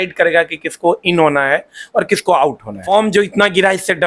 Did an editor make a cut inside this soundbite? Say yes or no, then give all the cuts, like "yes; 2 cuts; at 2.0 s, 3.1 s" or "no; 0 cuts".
yes; 1 cut; at 2.8 s